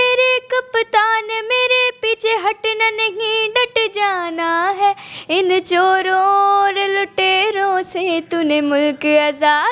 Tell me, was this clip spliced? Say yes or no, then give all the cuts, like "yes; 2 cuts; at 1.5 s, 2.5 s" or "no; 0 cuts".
no; 0 cuts